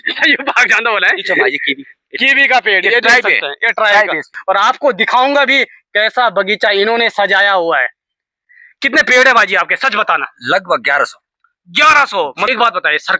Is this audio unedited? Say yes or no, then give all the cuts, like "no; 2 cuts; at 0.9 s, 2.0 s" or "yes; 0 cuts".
no; 1 cut; at 4.3 s